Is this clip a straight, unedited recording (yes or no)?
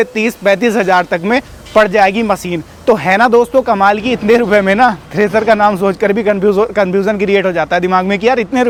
yes